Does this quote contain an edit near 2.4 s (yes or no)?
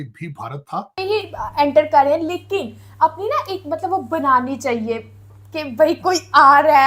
no